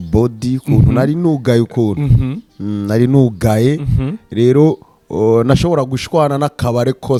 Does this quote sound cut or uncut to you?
uncut